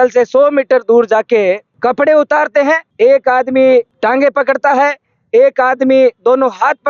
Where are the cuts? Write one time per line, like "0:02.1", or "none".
0:01.7